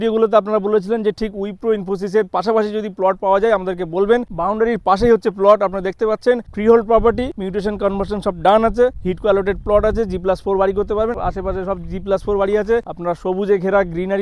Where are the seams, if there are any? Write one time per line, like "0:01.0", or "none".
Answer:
none